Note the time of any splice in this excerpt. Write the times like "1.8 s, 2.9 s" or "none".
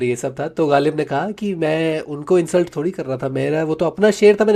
none